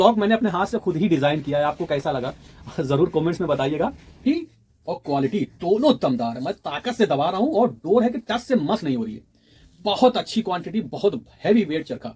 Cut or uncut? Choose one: cut